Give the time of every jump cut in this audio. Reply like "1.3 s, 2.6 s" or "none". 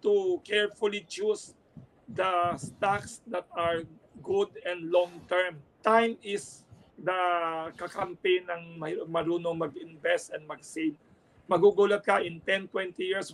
5.6 s